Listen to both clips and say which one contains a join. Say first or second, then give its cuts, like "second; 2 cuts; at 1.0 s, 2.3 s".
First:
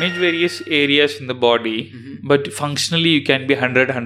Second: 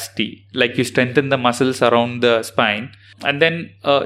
second; 1 cut; at 3.1 s